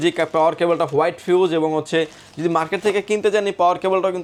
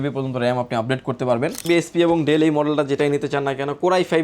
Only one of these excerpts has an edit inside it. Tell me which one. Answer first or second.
second